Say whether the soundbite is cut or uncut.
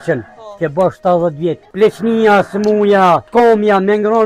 cut